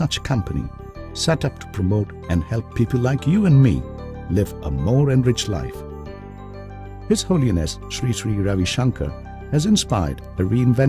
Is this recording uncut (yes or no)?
no